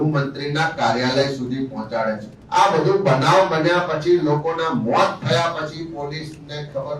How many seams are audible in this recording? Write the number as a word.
one